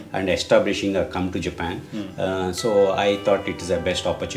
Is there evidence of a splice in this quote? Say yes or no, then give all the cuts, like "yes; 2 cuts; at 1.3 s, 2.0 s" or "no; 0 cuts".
no; 0 cuts